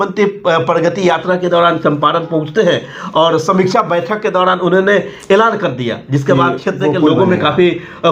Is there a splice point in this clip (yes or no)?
no